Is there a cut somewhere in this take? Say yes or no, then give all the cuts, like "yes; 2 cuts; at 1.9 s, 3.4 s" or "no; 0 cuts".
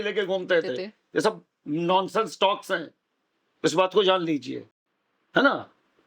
no; 0 cuts